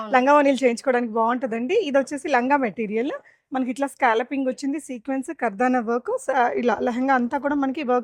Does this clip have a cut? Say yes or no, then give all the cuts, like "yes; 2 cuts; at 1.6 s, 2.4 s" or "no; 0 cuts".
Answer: no; 0 cuts